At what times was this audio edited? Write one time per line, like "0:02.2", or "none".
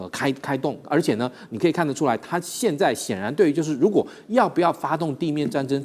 none